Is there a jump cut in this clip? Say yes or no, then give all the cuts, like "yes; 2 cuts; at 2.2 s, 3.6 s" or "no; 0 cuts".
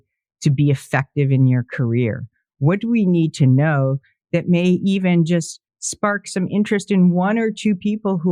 no; 0 cuts